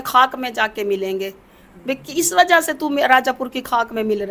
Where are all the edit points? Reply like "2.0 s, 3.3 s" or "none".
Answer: none